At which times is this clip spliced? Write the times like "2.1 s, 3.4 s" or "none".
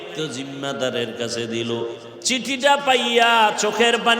2.1 s